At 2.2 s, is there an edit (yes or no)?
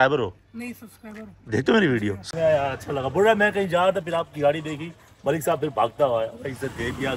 yes